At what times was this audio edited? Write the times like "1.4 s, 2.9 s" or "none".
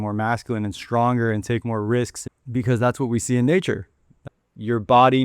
2.2 s, 4.2 s